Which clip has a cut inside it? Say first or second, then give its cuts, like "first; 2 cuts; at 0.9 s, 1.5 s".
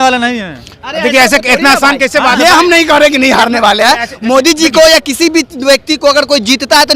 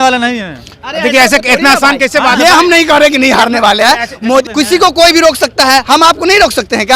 second; 1 cut; at 4.4 s